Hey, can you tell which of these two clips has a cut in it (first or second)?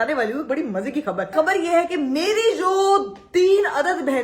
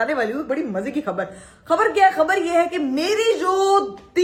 first